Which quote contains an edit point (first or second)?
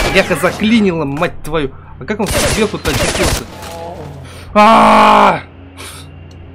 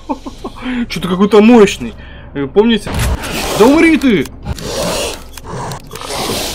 second